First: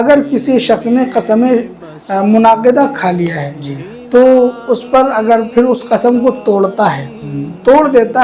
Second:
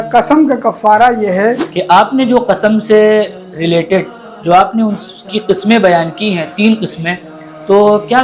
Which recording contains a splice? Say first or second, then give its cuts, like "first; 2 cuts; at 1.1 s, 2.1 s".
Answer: second; 1 cut; at 1.7 s